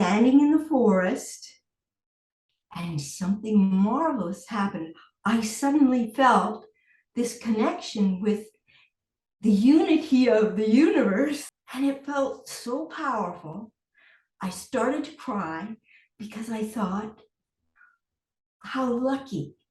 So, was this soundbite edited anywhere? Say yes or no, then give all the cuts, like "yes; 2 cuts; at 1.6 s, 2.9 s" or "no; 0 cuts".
yes; 1 cut; at 11.6 s